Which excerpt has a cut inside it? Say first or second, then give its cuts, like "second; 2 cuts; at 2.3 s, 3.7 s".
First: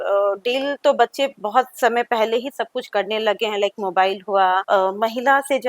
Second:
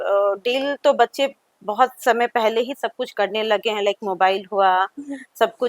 first; 2 cuts; at 1.4 s, 4.6 s